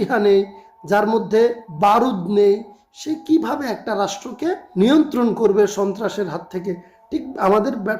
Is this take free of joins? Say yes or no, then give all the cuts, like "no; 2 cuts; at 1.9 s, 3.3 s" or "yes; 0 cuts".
no; 2 cuts; at 1.7 s, 4.6 s